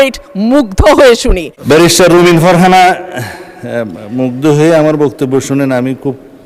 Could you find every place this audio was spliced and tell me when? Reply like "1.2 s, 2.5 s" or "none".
1.5 s